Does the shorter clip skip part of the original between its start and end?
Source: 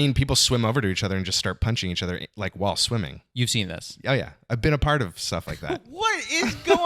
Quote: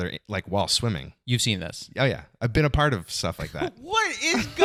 no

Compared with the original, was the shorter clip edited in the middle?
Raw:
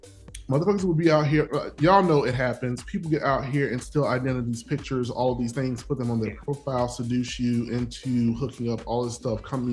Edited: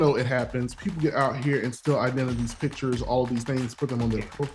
no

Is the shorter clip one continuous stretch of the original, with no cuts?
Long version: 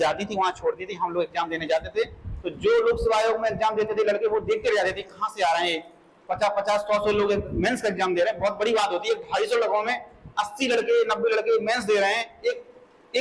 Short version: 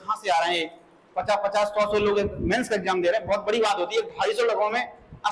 yes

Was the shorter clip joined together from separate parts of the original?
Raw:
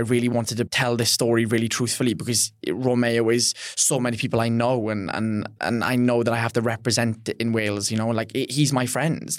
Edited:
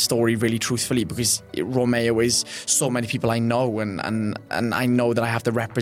no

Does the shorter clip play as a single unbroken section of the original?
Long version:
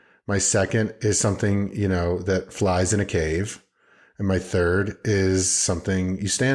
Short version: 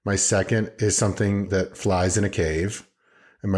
no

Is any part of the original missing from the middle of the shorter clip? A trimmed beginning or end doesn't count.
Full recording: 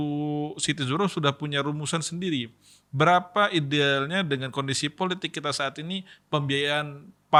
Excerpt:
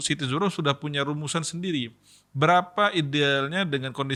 no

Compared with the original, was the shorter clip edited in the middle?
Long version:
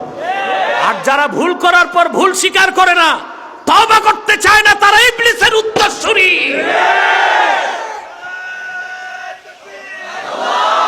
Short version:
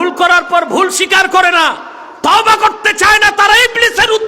no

